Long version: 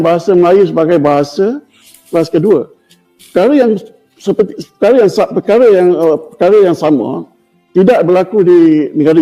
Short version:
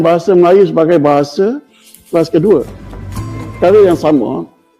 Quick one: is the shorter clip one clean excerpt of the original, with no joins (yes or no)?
no